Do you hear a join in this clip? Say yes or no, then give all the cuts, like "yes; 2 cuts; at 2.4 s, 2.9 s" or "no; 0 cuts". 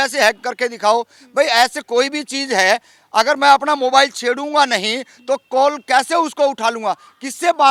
no; 0 cuts